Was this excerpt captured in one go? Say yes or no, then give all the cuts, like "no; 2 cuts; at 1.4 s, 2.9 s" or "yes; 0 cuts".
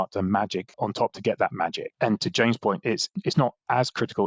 no; 3 cuts; at 0.8 s, 1.8 s, 3.1 s